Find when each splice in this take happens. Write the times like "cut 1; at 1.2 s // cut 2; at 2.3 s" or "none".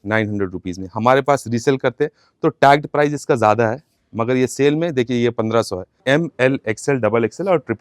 cut 1; at 6.0 s